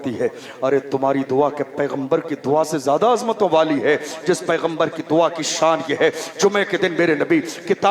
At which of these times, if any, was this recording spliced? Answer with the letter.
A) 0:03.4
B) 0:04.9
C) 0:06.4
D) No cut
D